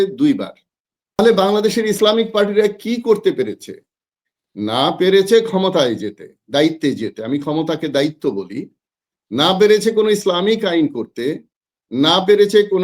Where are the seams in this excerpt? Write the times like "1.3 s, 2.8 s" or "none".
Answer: 1.2 s